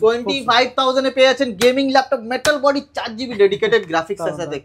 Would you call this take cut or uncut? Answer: uncut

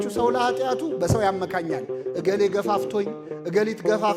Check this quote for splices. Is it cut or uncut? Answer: uncut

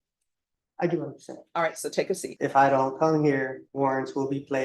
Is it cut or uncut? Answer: cut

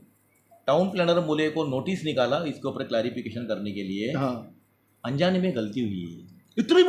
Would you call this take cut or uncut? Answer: uncut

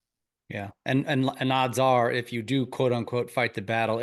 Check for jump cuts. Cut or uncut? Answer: uncut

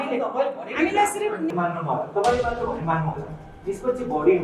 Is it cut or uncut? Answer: cut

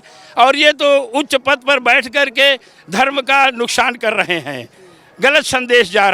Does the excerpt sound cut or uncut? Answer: uncut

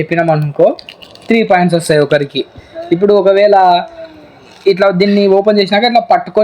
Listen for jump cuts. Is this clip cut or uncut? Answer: cut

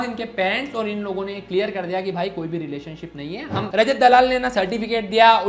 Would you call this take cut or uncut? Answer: cut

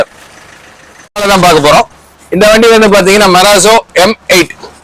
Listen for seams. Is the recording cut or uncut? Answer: cut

